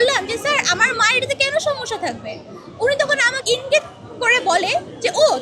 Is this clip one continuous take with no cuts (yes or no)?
no